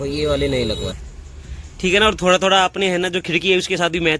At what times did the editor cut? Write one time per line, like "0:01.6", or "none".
0:00.9